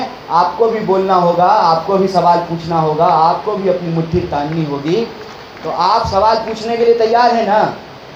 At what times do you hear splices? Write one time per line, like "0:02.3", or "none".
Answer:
none